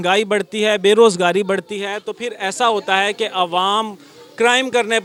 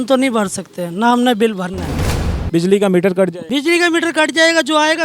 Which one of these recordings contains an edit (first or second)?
second